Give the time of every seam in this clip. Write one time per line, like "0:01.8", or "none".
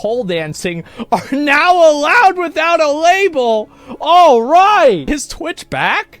0:05.1